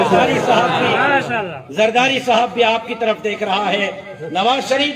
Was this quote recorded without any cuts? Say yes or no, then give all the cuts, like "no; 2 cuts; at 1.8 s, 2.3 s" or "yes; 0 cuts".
yes; 0 cuts